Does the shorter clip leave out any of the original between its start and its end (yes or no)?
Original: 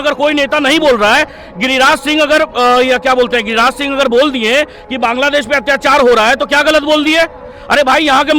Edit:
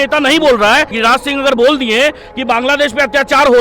yes